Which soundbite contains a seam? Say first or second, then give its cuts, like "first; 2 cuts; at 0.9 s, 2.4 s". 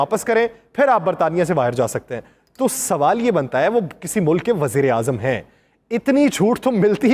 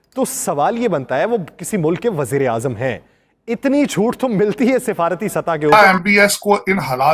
second; 1 cut; at 5.7 s